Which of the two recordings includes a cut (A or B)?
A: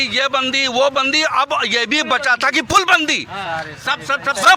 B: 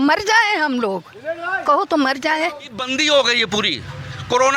B